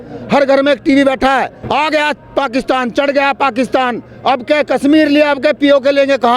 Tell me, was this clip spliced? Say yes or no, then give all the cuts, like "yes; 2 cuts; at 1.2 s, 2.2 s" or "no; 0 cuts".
yes; 1 cut; at 1.6 s